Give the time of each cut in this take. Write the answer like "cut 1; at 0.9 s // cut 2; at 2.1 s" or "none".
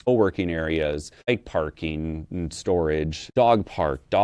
cut 1; at 1.3 s // cut 2; at 3.2 s